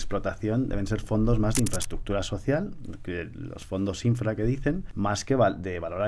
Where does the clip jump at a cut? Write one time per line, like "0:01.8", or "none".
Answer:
0:04.9